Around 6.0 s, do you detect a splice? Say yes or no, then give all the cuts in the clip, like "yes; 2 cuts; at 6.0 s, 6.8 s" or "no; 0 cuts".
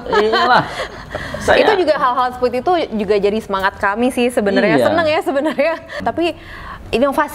yes; 1 cut; at 6.0 s